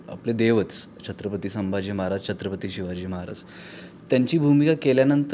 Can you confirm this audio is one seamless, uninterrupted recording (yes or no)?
yes